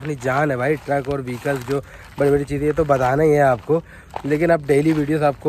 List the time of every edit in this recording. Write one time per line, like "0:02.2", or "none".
none